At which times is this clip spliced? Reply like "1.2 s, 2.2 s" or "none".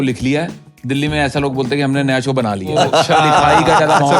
2.7 s